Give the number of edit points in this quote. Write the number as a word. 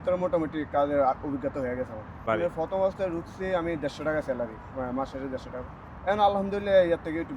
one